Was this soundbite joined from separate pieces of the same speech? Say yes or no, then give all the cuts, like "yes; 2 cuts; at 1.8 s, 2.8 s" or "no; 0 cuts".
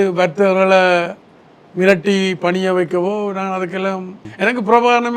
yes; 1 cut; at 4.2 s